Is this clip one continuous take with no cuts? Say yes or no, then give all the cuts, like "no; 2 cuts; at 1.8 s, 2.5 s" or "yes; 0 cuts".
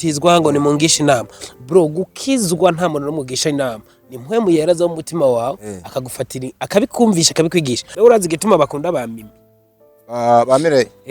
no; 1 cut; at 7.9 s